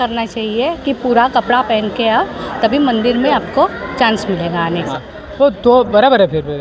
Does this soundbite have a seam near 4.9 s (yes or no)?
yes